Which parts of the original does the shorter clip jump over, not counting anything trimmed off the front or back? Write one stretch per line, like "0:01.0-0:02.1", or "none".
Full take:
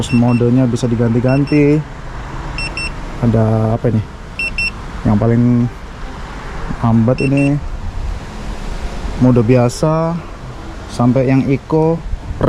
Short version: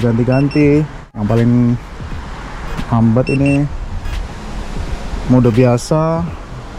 0:02.2-0:05.1